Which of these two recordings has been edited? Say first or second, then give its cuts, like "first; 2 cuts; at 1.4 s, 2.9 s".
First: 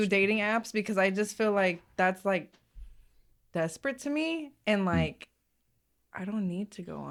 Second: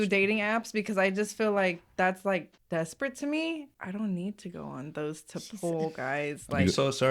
second; 2 cuts; at 2.6 s, 3.7 s